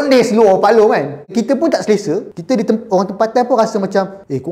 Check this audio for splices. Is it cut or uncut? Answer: cut